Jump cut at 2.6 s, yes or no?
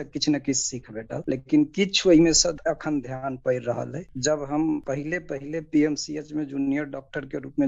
yes